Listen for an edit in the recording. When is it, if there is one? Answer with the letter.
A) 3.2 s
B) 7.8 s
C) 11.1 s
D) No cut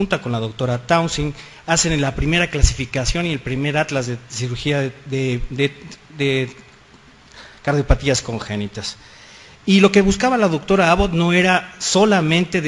A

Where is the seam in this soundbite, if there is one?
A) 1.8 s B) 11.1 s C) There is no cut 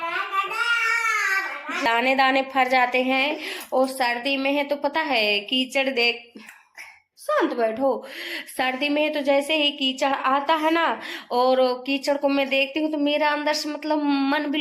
A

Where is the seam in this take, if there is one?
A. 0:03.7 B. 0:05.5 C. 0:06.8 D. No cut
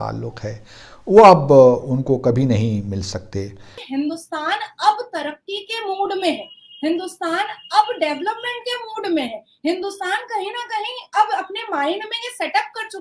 A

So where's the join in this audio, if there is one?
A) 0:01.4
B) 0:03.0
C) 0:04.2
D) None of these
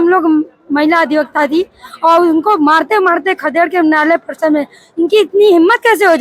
D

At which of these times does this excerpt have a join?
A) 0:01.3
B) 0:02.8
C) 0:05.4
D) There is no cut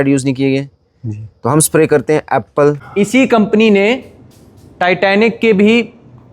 B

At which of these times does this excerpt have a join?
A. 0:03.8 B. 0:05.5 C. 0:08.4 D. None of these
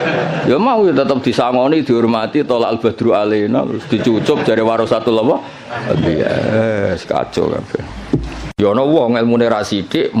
C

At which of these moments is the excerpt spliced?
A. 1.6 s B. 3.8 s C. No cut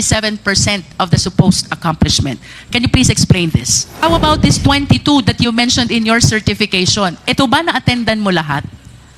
B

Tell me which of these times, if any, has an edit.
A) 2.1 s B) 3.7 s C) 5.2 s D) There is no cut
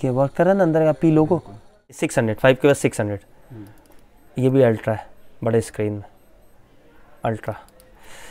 A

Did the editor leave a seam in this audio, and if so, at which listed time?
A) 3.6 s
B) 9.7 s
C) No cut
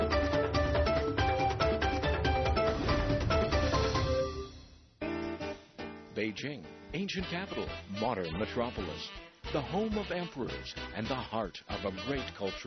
A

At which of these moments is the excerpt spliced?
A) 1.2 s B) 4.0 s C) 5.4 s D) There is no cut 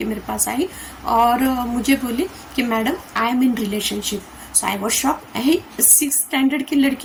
D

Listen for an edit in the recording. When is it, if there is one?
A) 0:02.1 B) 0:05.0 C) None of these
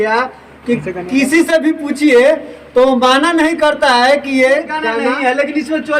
B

